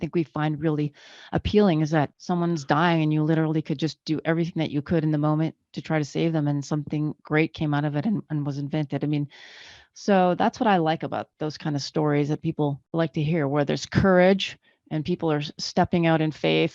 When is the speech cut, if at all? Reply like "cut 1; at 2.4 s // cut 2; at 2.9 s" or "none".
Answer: cut 1; at 2.2 s // cut 2; at 11.3 s // cut 3; at 12.8 s